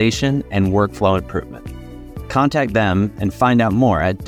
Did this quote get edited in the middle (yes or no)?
no